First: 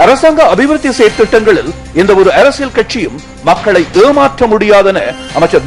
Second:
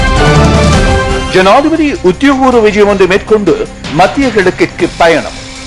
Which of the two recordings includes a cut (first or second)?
second